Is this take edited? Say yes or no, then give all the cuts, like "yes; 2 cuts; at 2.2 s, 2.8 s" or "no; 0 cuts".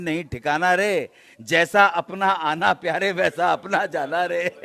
no; 0 cuts